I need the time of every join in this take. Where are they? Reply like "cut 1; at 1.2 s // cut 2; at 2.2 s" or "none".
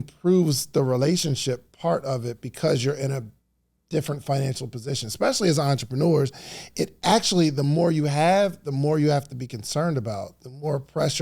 none